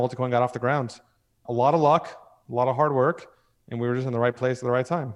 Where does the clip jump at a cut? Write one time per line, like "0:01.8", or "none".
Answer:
none